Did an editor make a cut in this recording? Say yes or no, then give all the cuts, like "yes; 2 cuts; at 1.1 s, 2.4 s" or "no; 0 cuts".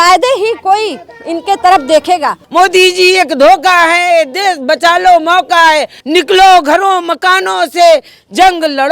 yes; 2 cuts; at 2.4 s, 6.0 s